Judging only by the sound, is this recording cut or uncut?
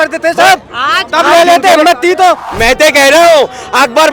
cut